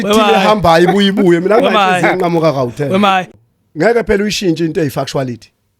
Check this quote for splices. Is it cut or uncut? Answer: cut